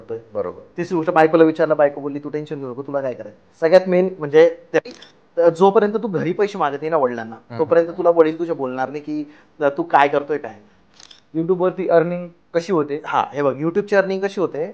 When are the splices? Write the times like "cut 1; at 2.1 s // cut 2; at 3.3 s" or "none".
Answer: cut 1; at 4.8 s // cut 2; at 11.2 s